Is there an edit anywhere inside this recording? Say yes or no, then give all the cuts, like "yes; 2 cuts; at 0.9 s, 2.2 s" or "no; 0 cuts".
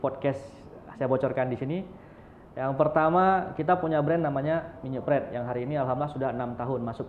no; 0 cuts